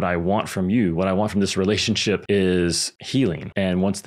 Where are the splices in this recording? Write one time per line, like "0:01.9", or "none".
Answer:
0:02.2
0:03.2